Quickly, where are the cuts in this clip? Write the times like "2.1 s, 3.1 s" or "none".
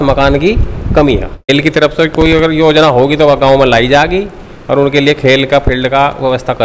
1.5 s